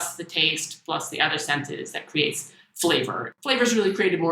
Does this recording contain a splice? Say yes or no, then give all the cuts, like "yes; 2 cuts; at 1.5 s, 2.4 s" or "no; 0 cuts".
yes; 1 cut; at 3.2 s